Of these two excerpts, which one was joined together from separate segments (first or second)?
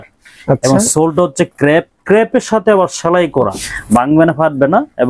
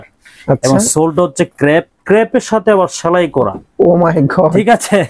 first